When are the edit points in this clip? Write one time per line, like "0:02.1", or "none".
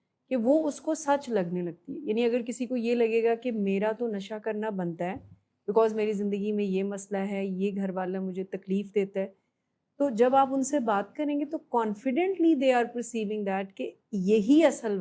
none